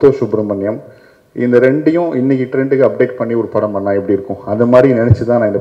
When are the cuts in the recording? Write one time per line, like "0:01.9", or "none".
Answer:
none